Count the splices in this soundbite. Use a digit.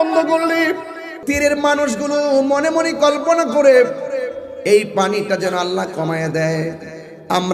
1